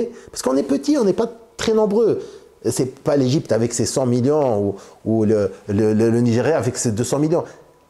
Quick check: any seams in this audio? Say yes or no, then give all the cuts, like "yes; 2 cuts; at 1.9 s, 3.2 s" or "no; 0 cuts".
no; 0 cuts